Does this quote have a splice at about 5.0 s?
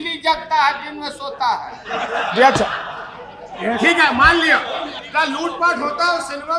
yes; 1 cut; at 5.0 s

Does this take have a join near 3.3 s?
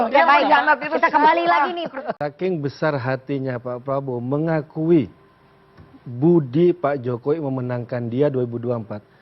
no; 1 cut; at 2.0 s

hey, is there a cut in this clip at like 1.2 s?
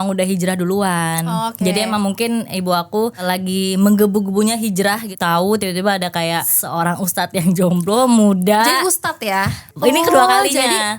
no; 4 cuts; at 3.2 s, 5.1 s, 6.6 s, 9.6 s

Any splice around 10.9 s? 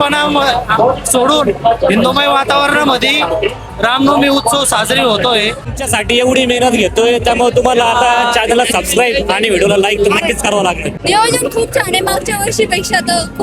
yes; 2 cuts; at 5.7 s, 10.9 s

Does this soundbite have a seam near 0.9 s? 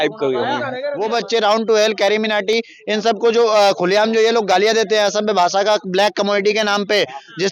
yes; 1 cut; at 0.9 s

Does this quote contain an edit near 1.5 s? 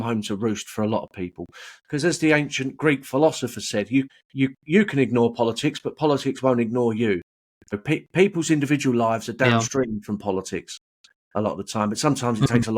no; 2 cuts; at 4.2 s, 7.8 s

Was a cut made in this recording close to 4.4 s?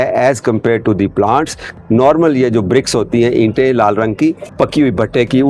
yes; 2 cuts; at 1.7 s, 4.4 s

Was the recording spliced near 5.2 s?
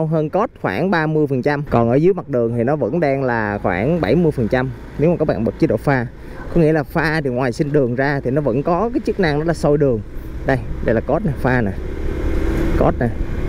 no; 1 cut; at 1.6 s

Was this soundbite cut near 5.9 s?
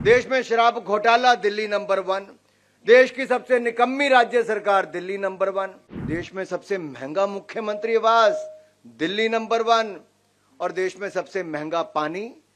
yes; 1 cut; at 5.9 s

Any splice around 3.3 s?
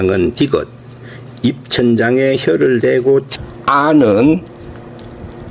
yes; 1 cut; at 3.3 s

